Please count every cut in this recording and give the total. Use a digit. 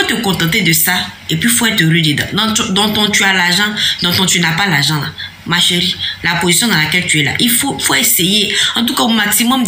2